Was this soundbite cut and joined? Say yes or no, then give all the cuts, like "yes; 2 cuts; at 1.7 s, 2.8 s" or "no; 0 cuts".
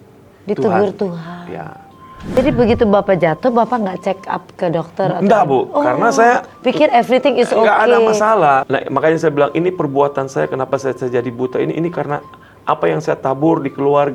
yes; 2 cuts; at 2.2 s, 8.6 s